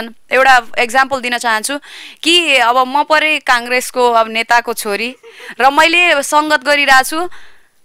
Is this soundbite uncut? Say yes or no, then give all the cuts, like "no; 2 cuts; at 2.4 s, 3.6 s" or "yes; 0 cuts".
yes; 0 cuts